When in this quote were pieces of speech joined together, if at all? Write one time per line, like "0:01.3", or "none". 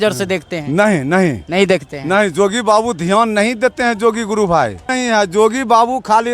0:04.9